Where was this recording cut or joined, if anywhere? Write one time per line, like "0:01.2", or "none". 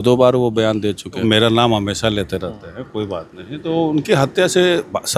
0:01.2